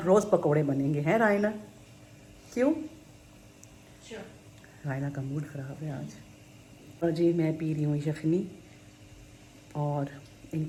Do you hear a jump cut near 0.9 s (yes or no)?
no